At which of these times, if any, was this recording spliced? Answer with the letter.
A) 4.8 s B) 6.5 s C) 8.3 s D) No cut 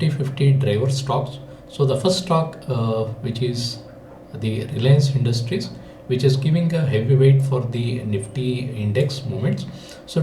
D